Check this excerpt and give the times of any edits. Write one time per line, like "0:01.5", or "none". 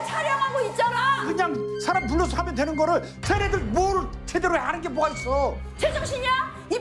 0:01.3
0:05.7